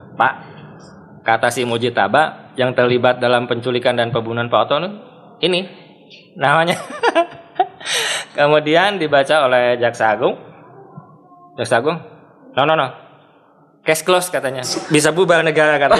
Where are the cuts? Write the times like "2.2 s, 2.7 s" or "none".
14.8 s